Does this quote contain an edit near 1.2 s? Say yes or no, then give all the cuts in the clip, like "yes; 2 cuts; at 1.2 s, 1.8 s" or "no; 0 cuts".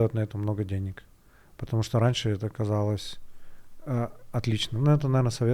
no; 0 cuts